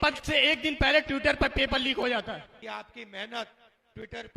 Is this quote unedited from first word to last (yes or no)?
no